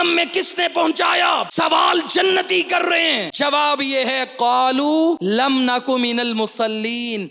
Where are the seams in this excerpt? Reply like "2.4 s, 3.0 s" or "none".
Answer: 1.5 s, 3.3 s, 5.2 s